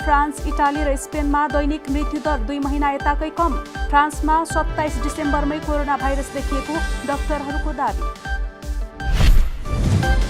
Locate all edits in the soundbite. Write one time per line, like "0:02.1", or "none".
0:09.4